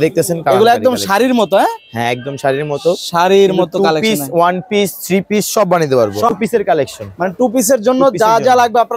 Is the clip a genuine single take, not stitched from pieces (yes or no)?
no